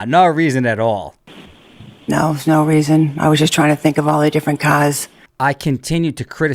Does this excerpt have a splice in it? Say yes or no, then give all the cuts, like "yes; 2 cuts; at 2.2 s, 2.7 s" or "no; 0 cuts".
no; 0 cuts